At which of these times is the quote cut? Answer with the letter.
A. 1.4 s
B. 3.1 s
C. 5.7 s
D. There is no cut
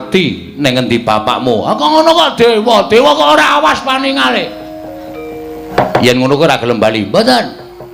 C